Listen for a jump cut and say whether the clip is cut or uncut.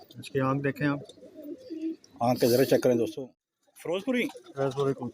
cut